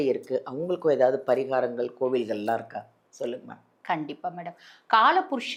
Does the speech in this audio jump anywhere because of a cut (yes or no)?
no